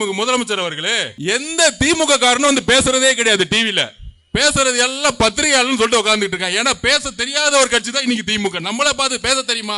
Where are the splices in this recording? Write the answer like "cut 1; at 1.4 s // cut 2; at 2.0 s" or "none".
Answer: cut 1; at 1.1 s